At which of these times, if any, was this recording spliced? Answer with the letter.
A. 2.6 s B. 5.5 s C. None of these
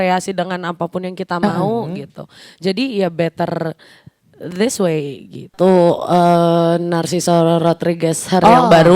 B